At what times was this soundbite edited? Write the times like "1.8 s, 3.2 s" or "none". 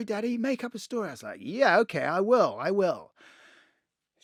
none